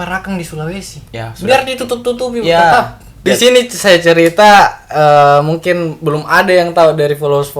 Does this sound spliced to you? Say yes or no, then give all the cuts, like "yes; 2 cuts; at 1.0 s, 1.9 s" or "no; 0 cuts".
yes; 1 cut; at 3.2 s